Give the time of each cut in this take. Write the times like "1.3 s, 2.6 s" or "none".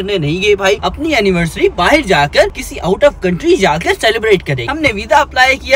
0.8 s, 4.7 s